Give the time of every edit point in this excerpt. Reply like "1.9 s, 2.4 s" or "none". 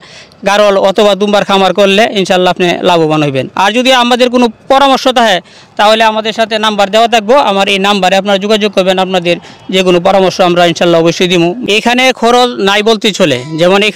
11.6 s